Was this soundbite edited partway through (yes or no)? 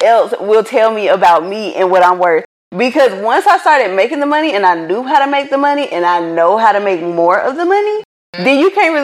no